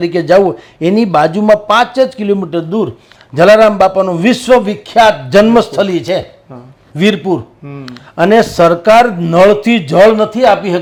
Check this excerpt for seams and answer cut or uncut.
uncut